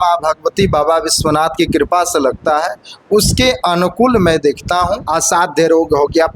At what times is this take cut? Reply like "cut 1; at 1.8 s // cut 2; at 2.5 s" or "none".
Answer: cut 1; at 5.1 s